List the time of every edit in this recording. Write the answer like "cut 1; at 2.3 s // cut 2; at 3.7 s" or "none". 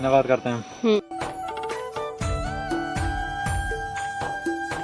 none